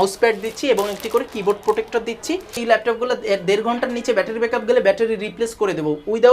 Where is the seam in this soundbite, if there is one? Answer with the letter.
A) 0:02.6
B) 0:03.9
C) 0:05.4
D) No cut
A